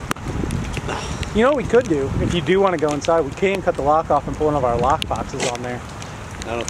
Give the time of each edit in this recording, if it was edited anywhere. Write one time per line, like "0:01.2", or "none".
none